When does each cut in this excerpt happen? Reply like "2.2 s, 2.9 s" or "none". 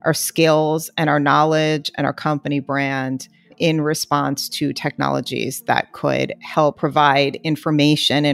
6.8 s